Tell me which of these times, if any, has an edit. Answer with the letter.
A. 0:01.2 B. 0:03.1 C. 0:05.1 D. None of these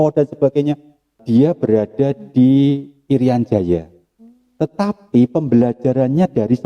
A